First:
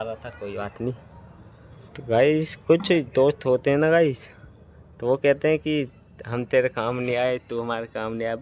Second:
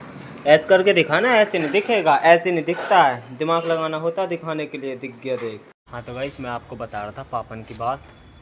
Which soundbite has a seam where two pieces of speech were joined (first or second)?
second